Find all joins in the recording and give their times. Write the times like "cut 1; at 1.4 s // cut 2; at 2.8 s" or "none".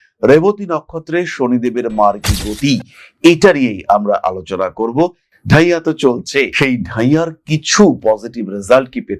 cut 1; at 5.3 s